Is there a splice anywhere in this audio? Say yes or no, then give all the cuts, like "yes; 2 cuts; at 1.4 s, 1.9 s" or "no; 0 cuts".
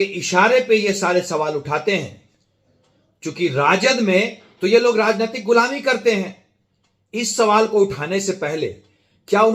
no; 0 cuts